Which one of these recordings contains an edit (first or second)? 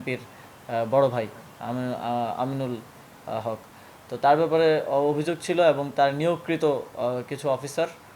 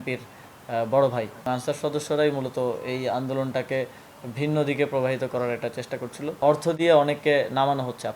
second